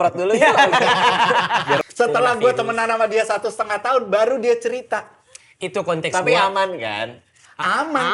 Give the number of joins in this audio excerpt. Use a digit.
1